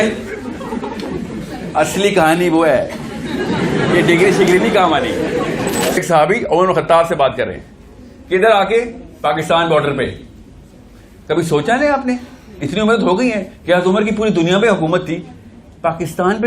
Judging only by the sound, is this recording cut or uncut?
cut